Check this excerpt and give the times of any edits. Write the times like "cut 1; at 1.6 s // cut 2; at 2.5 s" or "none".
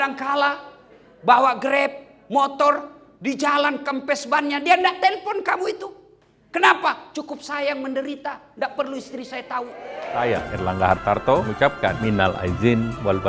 cut 1; at 10.3 s // cut 2; at 11.7 s